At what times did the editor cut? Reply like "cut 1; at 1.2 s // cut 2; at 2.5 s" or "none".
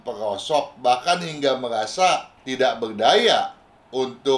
cut 1; at 2.4 s